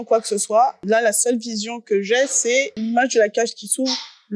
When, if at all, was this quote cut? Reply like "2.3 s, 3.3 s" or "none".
0.8 s, 2.8 s

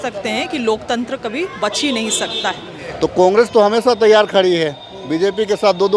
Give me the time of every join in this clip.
2.9 s

